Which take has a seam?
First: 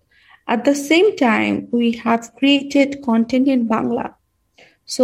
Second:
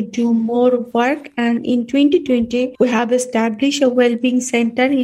second; 1 cut; at 2.7 s

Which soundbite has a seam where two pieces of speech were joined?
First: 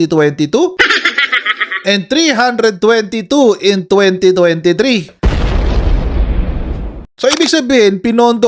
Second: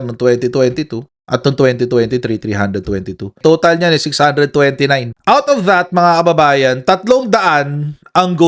first; 1 cut; at 7.0 s

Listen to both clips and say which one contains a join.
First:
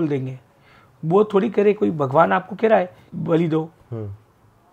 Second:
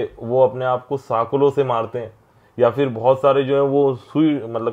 first; 1 cut; at 3.1 s

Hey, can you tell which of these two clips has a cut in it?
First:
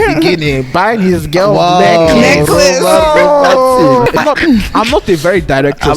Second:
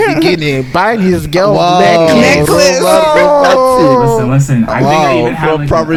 first; 1 cut; at 4.2 s

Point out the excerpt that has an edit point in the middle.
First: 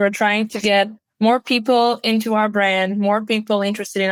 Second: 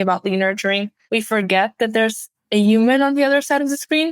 second; 1 cut; at 0.9 s

